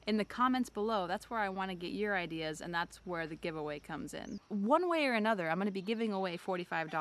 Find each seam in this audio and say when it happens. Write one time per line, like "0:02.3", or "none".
0:04.4